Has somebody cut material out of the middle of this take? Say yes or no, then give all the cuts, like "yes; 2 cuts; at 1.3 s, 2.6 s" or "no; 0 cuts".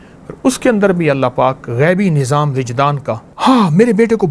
yes; 1 cut; at 3.3 s